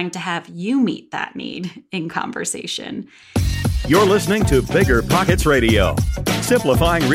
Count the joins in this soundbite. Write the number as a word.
one